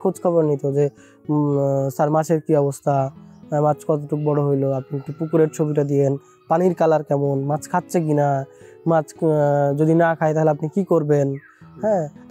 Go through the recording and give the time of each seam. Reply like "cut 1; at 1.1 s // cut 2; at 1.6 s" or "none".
none